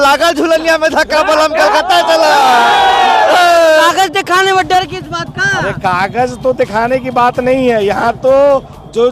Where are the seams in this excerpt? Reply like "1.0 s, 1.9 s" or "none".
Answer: 3.8 s